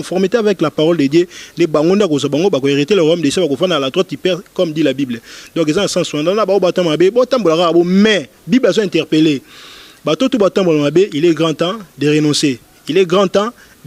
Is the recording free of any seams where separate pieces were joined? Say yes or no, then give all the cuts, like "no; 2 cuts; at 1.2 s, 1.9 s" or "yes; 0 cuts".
yes; 0 cuts